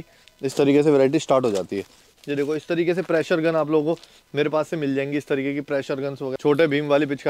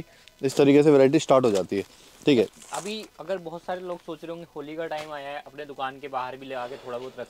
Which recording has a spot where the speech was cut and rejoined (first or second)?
first